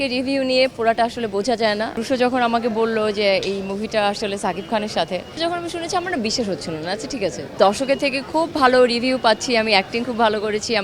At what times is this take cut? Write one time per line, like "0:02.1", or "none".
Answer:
0:02.0
0:05.3
0:07.5